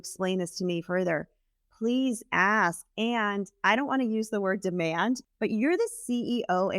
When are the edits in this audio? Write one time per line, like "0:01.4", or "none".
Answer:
0:05.2